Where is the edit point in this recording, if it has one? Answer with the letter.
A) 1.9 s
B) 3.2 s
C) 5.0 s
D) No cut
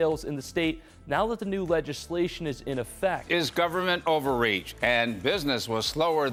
D